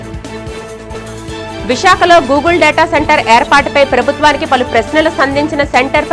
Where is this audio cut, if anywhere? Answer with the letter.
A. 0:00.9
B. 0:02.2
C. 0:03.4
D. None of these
A